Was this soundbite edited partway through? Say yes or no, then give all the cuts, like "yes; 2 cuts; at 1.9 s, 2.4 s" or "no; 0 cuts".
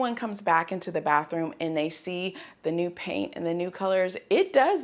no; 0 cuts